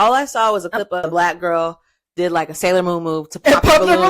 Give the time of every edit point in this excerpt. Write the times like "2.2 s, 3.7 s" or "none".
1.0 s